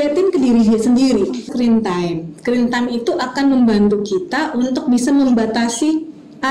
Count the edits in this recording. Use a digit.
1